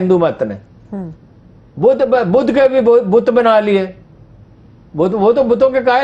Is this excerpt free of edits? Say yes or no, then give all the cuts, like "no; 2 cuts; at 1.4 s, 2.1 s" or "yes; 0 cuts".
yes; 0 cuts